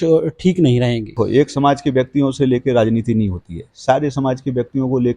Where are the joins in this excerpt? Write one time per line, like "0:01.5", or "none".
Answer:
0:01.2

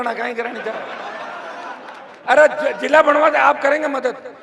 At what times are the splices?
0:02.1

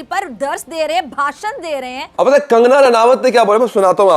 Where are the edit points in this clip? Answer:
0:02.0

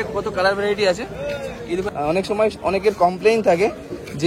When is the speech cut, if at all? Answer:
0:01.9

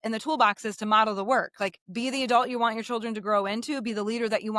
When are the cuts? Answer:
0:01.8

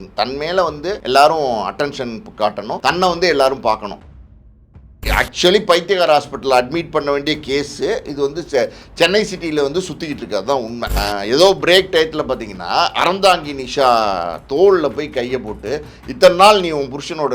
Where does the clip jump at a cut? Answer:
0:01.0
0:02.8
0:04.4
0:10.9

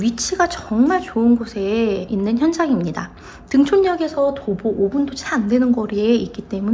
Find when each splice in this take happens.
0:02.1

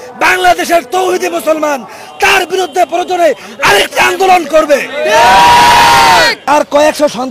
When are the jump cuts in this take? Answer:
0:06.4

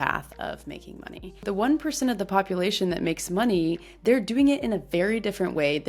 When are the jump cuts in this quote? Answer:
0:01.4
0:03.9

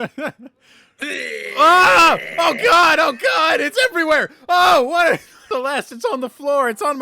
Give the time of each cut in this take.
0:05.3

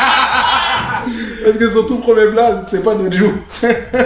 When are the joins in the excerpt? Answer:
0:01.0

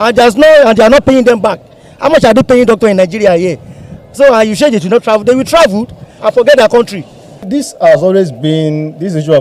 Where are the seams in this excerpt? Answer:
0:06.1
0:07.4

